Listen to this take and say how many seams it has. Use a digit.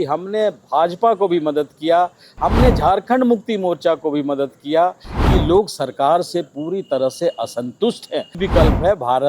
2